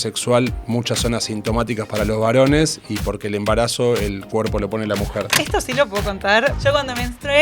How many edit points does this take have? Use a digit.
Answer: 2